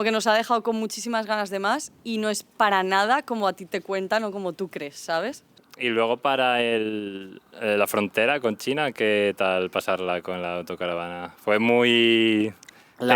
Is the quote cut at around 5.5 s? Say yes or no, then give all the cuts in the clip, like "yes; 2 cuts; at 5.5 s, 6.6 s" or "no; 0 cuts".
yes; 1 cut; at 5.5 s